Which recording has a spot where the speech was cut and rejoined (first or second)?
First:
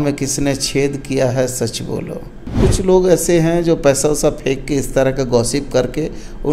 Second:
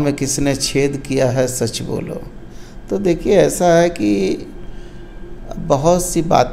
first